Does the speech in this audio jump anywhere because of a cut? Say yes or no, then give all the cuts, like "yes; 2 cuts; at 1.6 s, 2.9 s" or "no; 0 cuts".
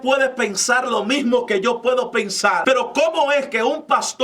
yes; 1 cut; at 2.6 s